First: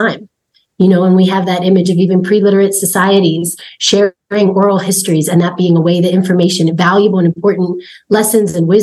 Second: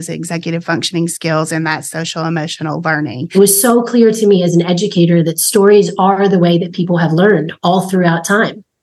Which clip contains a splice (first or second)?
second